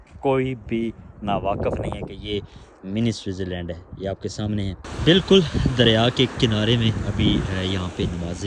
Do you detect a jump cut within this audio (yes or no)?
yes